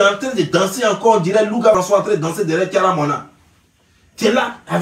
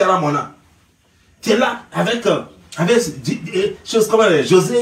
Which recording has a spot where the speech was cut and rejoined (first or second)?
first